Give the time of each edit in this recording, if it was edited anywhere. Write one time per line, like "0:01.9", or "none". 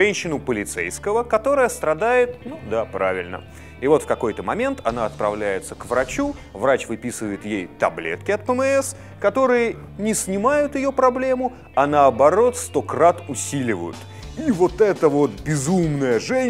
0:01.8